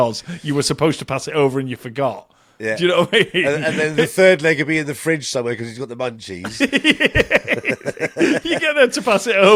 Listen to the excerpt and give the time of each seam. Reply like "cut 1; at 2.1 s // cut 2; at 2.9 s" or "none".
none